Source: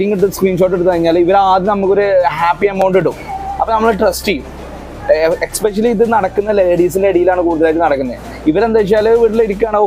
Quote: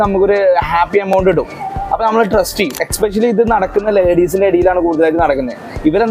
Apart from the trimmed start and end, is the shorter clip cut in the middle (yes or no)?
yes